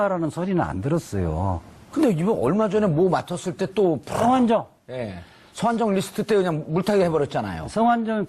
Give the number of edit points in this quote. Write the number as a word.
one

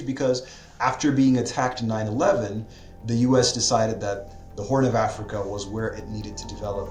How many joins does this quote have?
zero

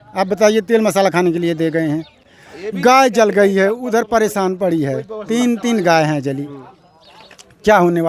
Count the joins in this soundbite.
zero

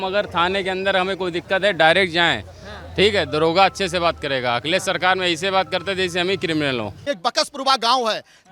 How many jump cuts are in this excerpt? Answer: one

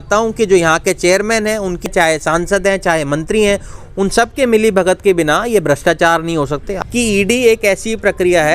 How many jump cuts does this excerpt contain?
two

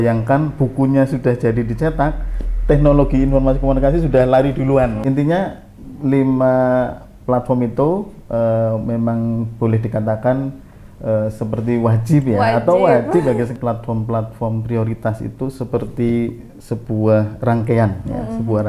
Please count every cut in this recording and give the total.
two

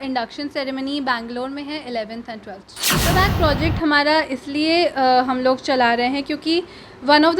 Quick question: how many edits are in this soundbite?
one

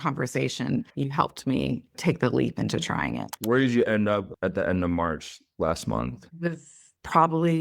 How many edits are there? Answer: one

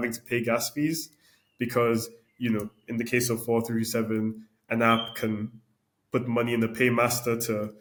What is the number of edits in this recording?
zero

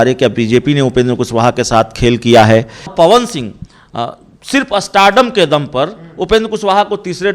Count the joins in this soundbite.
one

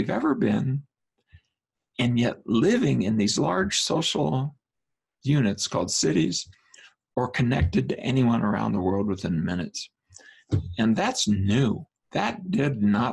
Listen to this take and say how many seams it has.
zero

